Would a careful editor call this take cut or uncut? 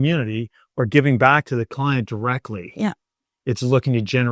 uncut